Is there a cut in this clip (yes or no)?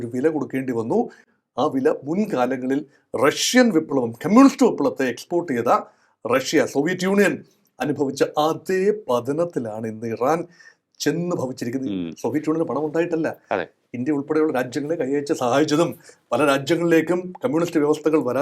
no